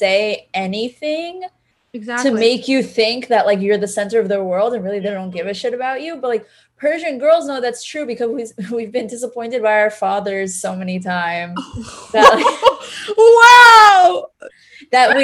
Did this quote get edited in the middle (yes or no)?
no